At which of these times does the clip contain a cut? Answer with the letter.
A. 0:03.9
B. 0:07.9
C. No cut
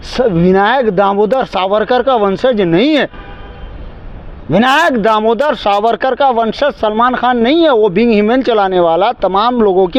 C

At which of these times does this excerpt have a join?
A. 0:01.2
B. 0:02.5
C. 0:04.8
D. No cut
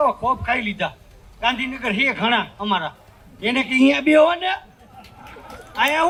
D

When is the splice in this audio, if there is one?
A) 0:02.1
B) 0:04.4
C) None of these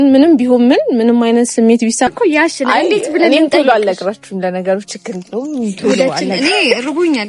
A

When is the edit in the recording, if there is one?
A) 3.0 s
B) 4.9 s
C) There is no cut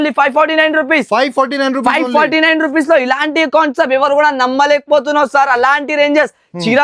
C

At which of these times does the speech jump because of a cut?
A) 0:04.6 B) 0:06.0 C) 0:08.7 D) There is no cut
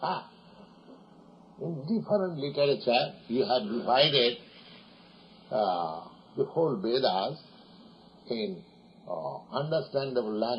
C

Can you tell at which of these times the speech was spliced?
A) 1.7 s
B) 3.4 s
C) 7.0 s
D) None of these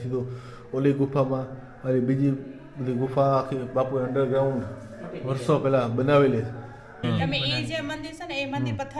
C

